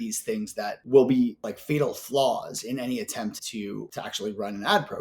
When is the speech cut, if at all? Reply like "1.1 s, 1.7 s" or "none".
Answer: 0.8 s, 1.5 s, 3.7 s